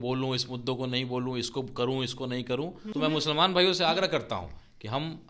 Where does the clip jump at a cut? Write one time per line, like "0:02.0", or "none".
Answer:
0:02.8